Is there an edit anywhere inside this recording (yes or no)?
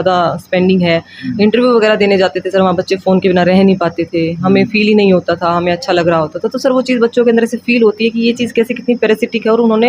no